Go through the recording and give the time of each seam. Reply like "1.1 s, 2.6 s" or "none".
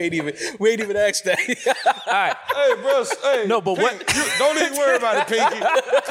none